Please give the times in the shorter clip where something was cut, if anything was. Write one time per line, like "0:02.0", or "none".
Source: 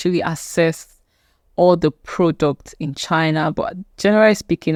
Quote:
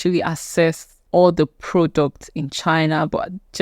0:00.9